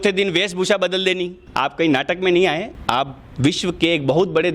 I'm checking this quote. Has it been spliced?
yes; 2 cuts; at 1.4 s, 2.7 s

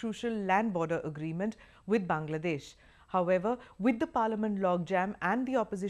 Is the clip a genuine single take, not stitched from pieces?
no; 1 cut; at 4.9 s

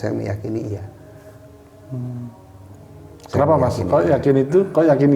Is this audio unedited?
yes; 0 cuts

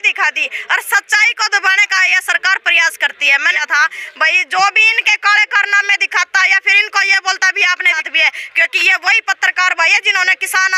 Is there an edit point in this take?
yes; 2 cuts; at 3.6 s, 8.0 s

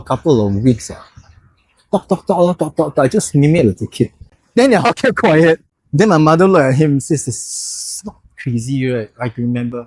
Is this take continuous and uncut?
yes; 0 cuts

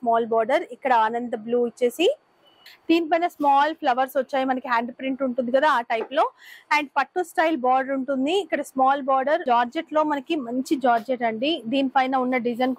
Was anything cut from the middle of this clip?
yes; 2 cuts; at 2.7 s, 9.4 s

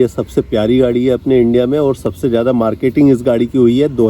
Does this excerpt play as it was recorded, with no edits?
yes; 0 cuts

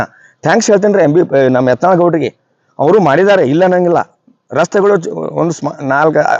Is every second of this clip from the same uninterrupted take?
yes; 0 cuts

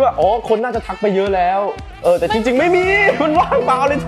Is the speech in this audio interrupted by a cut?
no; 0 cuts

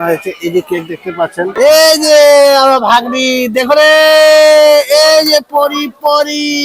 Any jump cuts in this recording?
yes; 1 cut; at 1.6 s

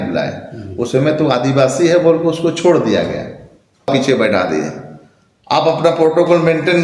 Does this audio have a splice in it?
yes; 1 cut; at 3.9 s

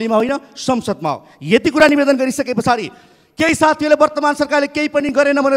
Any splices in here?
no; 0 cuts

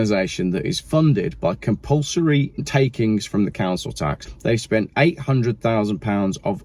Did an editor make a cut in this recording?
yes; 3 cuts; at 0.8 s, 2.6 s, 4.3 s

